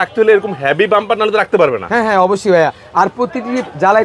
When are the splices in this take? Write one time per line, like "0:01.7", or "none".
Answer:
none